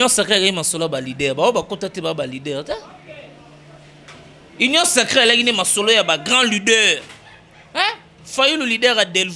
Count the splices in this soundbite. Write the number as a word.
zero